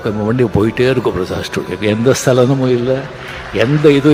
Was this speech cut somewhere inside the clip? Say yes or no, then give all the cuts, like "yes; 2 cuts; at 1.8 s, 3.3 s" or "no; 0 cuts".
no; 0 cuts